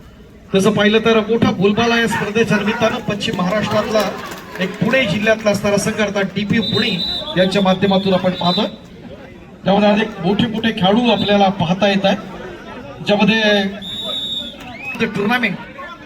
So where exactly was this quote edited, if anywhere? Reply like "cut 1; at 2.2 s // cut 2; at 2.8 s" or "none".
cut 1; at 15.0 s